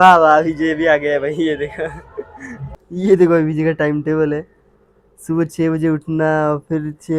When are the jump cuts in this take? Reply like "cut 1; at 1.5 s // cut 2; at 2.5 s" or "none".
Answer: cut 1; at 2.6 s